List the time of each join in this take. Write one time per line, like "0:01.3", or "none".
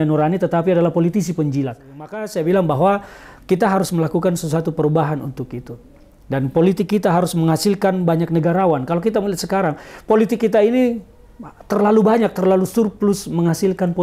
0:02.2